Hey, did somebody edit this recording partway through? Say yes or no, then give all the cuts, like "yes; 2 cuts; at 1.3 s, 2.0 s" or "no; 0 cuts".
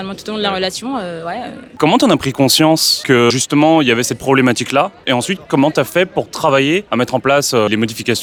no; 0 cuts